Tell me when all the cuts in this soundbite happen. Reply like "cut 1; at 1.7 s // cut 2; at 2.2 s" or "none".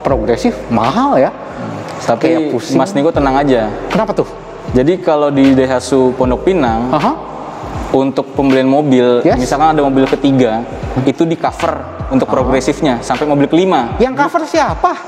none